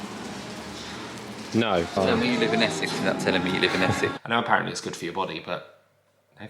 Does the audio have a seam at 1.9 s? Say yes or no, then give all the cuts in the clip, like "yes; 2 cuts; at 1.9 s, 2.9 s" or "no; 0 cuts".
yes; 2 cuts; at 1.9 s, 4.2 s